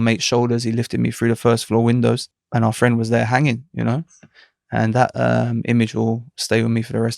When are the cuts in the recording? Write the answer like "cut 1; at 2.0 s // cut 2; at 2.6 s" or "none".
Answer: cut 1; at 2.4 s

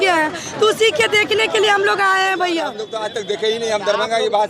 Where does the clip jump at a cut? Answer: cut 1; at 2.8 s

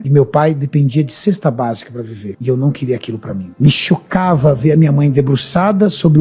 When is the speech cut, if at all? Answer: none

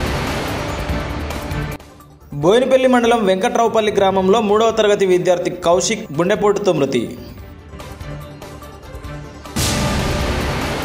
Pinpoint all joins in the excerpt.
cut 1; at 1.0 s

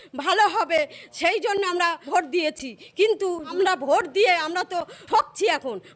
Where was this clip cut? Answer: cut 1; at 2.0 s // cut 2; at 5.0 s

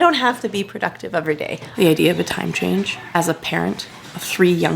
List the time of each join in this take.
cut 1; at 1.7 s

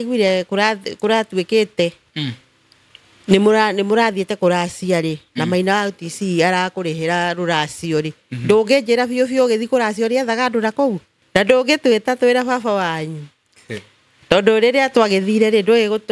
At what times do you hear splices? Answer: cut 1; at 11.1 s

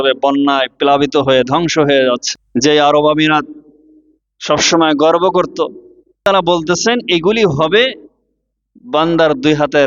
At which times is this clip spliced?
cut 1; at 2.3 s // cut 2; at 6.2 s

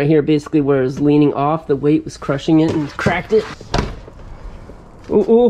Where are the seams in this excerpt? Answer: cut 1; at 3.6 s

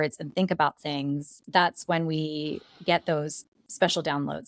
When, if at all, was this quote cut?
cut 1; at 1.3 s

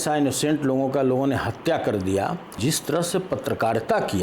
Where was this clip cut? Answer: cut 1; at 2.6 s

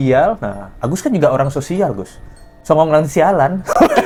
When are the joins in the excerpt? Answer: none

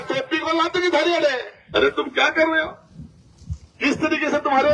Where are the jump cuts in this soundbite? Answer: cut 1; at 1.5 s

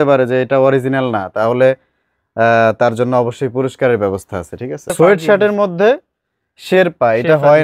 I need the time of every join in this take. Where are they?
cut 1; at 4.9 s

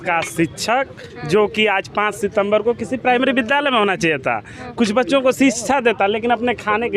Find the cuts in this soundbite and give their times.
none

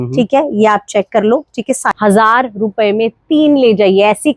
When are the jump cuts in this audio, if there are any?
cut 1; at 1.8 s

